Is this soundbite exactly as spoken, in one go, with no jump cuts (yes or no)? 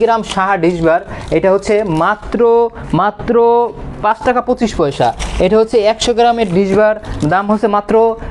yes